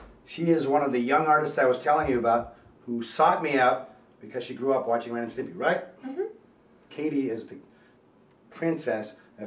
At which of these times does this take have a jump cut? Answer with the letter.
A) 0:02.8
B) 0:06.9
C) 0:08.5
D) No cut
B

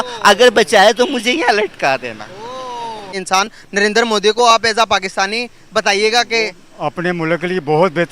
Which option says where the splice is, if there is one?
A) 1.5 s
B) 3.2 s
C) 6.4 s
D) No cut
B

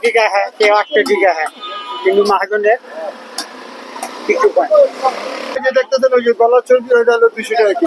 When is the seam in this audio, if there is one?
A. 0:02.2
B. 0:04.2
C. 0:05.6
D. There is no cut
C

